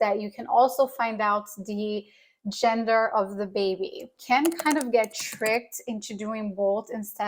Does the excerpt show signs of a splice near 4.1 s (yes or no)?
yes